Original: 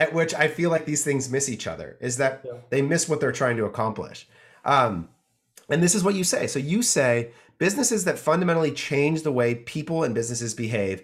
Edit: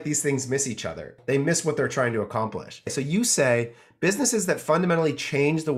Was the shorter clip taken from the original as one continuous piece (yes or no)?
no